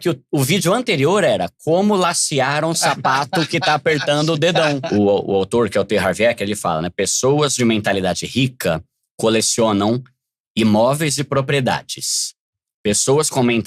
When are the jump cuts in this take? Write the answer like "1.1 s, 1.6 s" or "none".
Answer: 4.8 s